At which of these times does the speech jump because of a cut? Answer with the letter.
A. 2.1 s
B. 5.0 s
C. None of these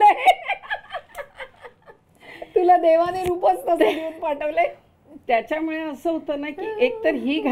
C